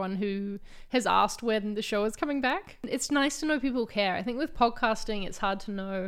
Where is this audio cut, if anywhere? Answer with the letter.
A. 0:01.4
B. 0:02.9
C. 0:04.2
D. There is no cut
B